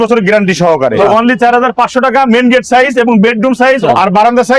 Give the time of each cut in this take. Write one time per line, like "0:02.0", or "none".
0:01.0